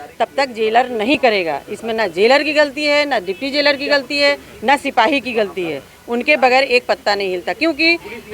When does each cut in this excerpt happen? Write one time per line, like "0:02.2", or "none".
none